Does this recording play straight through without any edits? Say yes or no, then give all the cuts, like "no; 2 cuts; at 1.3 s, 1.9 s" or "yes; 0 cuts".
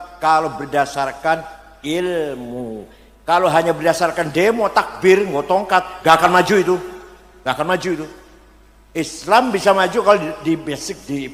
yes; 0 cuts